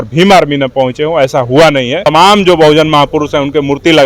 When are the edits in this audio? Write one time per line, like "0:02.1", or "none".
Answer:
0:02.0